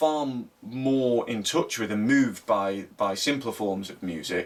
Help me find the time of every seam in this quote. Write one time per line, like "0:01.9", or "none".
none